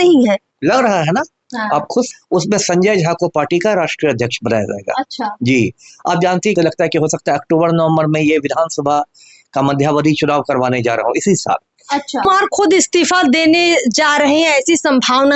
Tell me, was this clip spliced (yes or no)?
yes